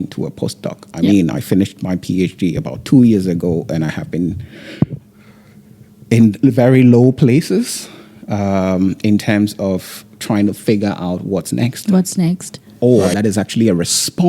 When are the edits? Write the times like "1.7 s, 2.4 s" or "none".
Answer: 12.6 s